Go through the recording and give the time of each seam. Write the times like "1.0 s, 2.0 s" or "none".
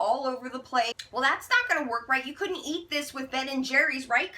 1.0 s